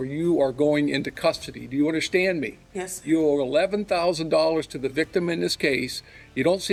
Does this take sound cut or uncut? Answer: uncut